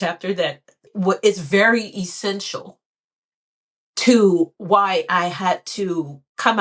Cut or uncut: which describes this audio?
cut